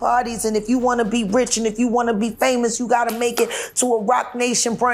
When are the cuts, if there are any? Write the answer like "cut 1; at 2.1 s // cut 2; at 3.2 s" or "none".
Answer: none